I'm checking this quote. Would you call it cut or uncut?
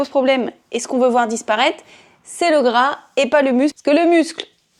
uncut